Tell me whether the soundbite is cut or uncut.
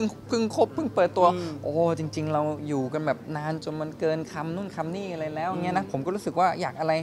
uncut